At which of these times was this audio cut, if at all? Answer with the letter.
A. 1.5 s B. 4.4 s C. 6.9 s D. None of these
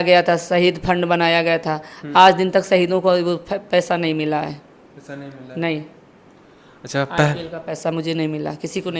D